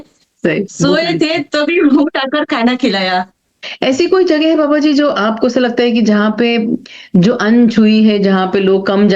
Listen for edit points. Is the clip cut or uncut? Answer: cut